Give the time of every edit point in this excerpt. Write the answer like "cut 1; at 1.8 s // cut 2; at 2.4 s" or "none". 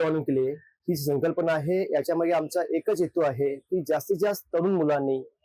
none

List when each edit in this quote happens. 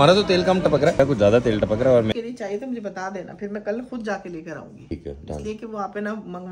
cut 1; at 1.0 s // cut 2; at 2.1 s // cut 3; at 4.9 s

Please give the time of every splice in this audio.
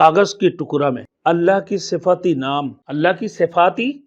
cut 1; at 1.1 s // cut 2; at 2.8 s

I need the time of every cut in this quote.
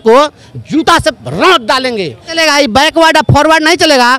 cut 1; at 2.3 s

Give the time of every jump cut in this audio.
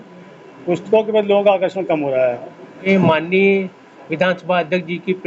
cut 1; at 2.8 s

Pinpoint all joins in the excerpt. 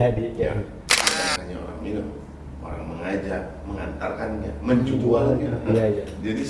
cut 1; at 1.0 s

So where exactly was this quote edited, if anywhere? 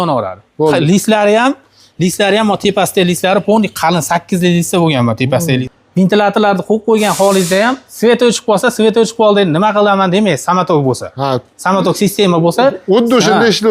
cut 1; at 5.7 s

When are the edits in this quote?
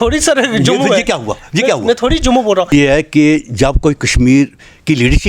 cut 1; at 2.7 s

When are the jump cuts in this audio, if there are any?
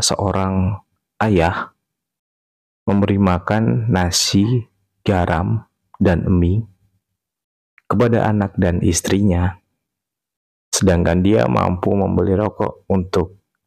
none

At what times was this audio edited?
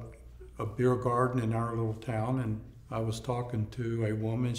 cut 1; at 2.7 s

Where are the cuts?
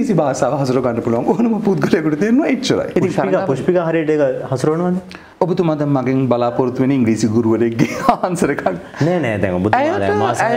cut 1; at 2.9 s // cut 2; at 5.2 s

